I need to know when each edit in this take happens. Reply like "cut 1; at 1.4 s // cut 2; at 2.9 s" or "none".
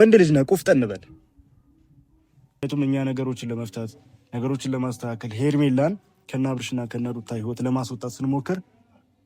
cut 1; at 2.6 s